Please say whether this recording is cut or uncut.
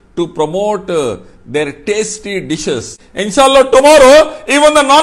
cut